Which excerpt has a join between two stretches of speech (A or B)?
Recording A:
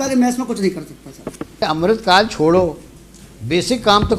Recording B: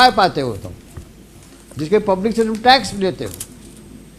A